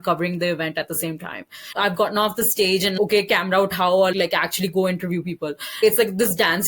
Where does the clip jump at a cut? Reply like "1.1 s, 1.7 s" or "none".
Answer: 1.7 s, 3.0 s, 4.1 s, 5.8 s